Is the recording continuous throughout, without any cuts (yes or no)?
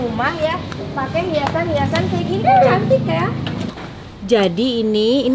no